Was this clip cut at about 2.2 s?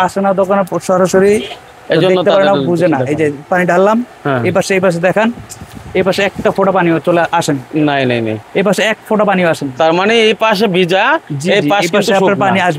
no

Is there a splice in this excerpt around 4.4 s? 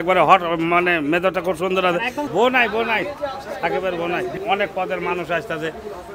yes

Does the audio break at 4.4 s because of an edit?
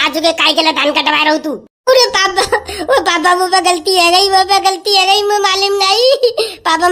no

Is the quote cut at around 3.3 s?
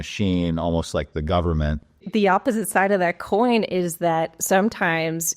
no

